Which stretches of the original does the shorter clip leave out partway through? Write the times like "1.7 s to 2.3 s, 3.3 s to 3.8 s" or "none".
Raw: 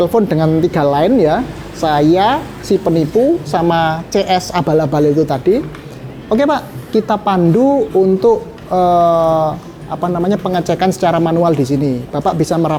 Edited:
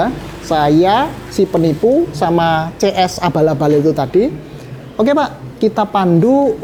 none